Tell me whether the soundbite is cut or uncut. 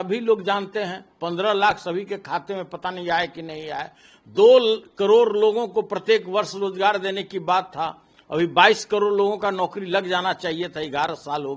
uncut